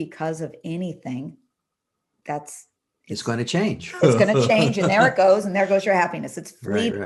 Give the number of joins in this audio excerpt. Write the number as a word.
zero